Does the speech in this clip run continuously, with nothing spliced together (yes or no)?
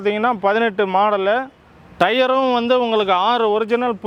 yes